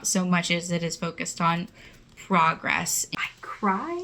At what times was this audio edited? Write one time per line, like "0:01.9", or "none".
0:03.0